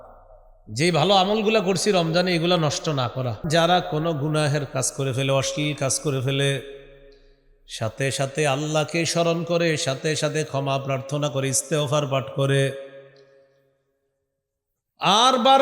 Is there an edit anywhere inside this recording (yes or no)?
yes